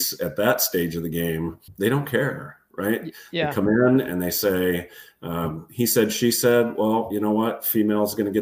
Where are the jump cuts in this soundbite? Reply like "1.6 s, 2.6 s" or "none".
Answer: 1.6 s